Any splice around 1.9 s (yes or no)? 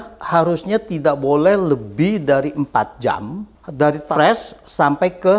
no